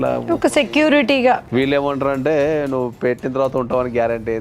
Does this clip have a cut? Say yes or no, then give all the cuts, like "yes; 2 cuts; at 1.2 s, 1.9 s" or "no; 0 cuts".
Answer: yes; 1 cut; at 1.4 s